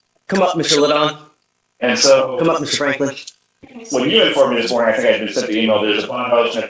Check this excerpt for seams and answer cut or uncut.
uncut